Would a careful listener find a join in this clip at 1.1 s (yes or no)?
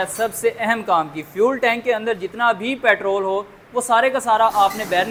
no